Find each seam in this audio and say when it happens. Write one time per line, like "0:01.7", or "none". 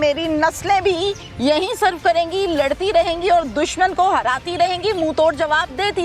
none